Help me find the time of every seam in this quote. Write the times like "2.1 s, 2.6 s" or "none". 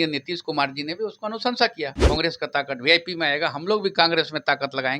2.0 s